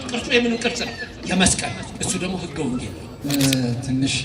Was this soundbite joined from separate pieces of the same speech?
yes; 1 cut; at 3.2 s

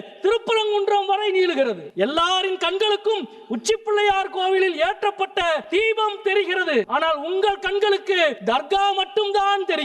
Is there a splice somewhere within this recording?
yes; 4 cuts; at 1.9 s, 5.6 s, 6.9 s, 8.4 s

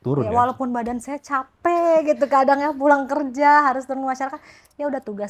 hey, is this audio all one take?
yes; 0 cuts

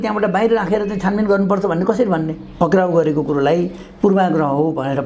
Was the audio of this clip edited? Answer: yes; 1 cut; at 2.4 s

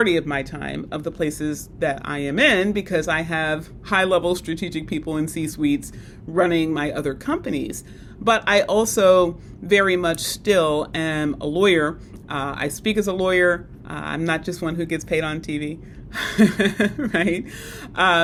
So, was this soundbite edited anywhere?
no; 0 cuts

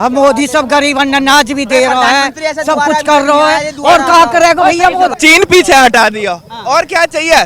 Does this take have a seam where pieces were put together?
yes; 1 cut; at 5.1 s

